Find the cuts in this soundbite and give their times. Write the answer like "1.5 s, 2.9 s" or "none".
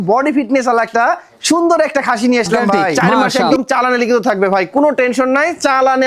3.5 s